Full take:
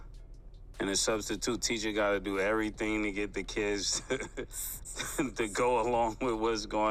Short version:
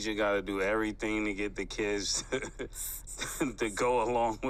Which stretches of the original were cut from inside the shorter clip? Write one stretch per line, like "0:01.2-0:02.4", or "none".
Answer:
none